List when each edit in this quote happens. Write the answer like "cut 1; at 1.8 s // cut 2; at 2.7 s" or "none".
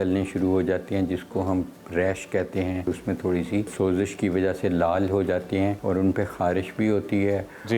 cut 1; at 2.9 s // cut 2; at 3.7 s // cut 3; at 5.8 s